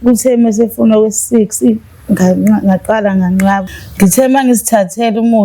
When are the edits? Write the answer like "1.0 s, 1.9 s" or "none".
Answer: 3.8 s